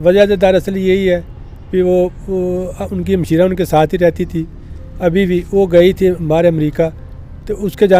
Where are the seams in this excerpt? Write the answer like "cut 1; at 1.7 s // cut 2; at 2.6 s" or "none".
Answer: none